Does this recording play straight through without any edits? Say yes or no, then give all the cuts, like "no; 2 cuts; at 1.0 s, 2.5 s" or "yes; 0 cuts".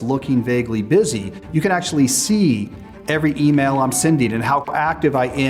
yes; 0 cuts